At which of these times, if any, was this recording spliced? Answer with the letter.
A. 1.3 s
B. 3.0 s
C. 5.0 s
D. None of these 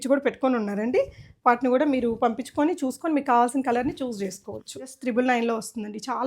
C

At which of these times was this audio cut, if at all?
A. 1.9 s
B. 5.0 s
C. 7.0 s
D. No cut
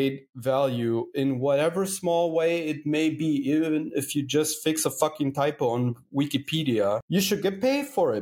C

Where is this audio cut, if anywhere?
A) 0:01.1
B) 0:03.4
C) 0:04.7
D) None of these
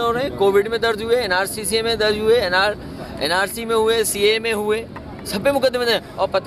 D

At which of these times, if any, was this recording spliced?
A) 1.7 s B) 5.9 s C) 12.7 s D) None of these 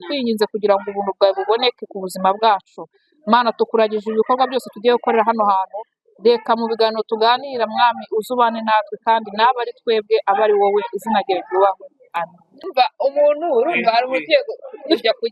C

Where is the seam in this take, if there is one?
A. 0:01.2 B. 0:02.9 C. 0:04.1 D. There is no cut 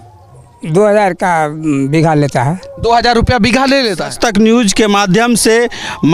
C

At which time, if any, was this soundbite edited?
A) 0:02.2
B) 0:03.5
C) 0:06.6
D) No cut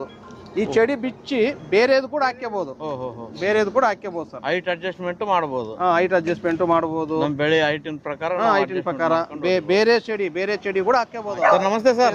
D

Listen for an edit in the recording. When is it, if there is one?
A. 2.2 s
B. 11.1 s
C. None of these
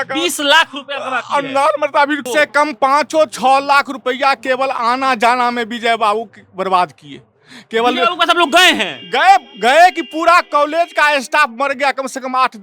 A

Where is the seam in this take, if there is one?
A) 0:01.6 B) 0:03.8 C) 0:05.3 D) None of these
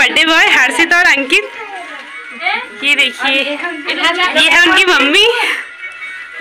D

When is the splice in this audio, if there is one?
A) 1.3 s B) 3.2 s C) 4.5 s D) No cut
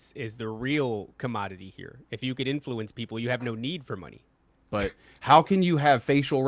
C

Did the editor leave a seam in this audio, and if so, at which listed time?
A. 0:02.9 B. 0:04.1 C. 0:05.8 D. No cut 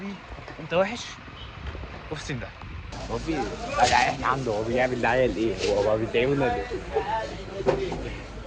A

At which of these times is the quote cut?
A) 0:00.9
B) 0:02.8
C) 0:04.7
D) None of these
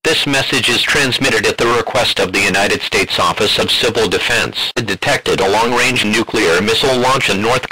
C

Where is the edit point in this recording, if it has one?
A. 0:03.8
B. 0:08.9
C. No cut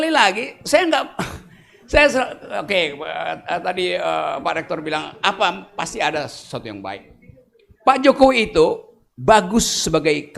C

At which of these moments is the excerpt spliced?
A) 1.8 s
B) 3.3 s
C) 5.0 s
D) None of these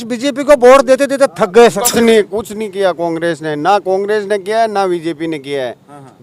A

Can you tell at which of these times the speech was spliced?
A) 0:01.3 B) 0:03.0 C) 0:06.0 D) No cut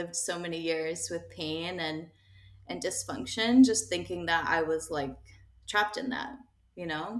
D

